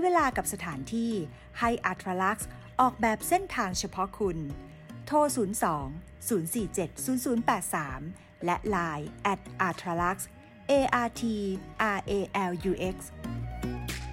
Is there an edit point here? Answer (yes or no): yes